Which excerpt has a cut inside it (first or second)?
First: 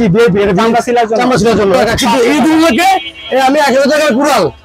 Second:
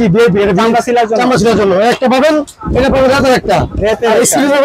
first